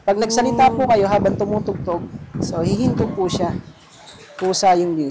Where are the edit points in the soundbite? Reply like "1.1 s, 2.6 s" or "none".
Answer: none